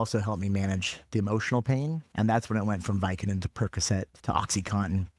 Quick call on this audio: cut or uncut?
uncut